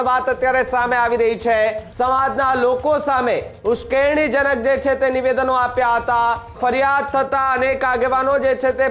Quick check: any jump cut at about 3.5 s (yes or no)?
no